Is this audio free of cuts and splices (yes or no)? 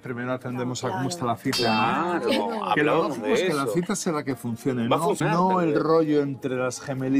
yes